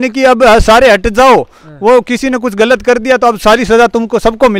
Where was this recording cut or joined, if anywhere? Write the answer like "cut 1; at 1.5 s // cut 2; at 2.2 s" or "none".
none